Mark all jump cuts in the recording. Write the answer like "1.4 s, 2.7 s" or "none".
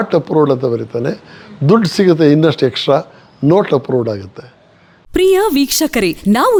none